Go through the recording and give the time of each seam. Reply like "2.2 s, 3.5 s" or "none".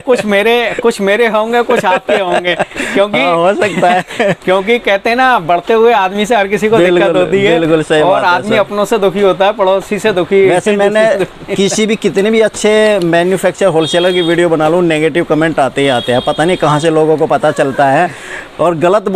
none